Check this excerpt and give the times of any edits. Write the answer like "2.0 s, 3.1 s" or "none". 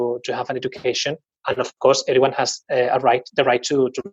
none